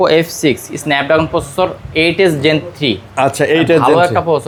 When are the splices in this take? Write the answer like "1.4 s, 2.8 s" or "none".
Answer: none